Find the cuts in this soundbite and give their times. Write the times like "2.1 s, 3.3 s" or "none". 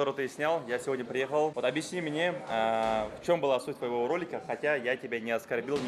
1.5 s